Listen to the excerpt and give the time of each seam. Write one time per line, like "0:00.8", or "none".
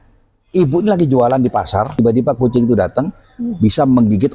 0:01.9